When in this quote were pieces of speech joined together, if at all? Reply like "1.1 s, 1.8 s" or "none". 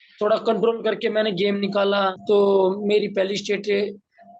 2.2 s